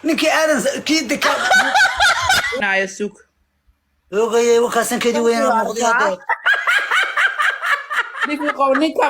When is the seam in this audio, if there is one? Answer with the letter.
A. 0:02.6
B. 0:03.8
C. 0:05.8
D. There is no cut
A